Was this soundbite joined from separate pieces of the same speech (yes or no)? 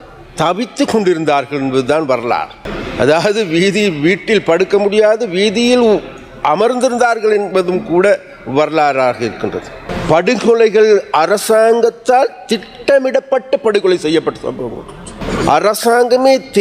yes